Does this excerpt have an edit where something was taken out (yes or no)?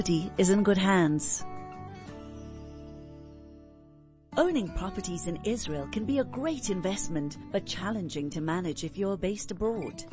no